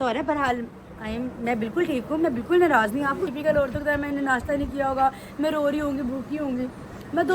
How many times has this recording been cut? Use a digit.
1